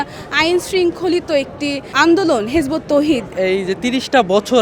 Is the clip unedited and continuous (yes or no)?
no